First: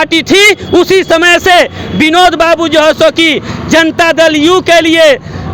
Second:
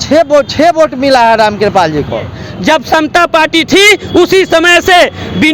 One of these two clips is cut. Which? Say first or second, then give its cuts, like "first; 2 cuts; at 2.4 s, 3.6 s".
second; 1 cut; at 2.4 s